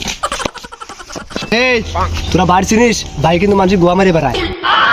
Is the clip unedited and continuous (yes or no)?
no